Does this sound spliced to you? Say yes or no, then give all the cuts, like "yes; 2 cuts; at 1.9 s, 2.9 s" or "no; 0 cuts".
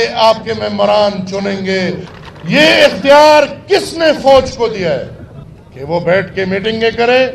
yes; 1 cut; at 2.0 s